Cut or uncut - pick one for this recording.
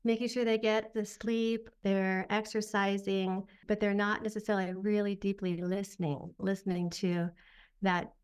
cut